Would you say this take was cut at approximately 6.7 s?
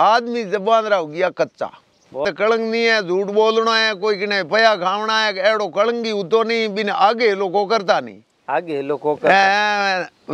no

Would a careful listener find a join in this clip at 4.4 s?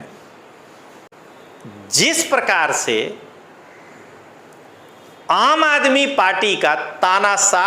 no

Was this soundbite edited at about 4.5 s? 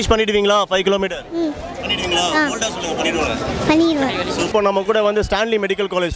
no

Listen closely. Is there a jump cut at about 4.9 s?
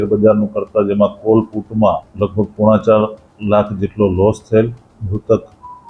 yes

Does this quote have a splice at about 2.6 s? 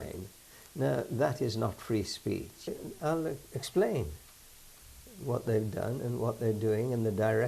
yes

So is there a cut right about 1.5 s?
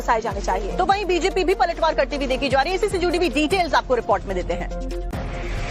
no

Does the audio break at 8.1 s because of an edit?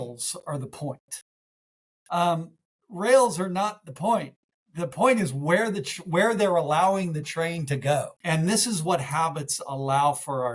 yes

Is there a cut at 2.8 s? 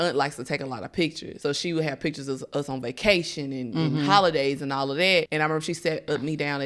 no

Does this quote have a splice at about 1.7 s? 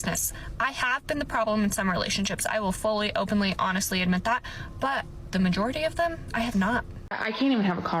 no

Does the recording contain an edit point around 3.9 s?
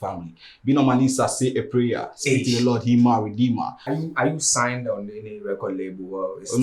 yes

